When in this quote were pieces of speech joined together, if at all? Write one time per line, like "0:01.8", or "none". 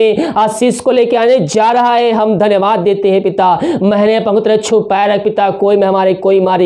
none